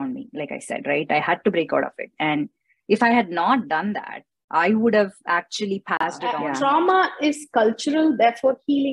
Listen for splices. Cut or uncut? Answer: cut